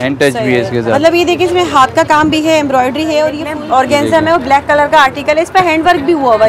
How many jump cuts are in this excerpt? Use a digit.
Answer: 1